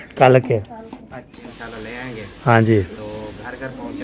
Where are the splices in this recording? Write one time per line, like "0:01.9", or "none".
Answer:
0:01.5